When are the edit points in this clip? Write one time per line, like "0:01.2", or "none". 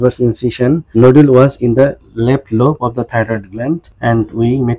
0:00.9
0:03.9